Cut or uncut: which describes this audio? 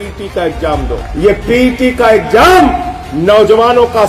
cut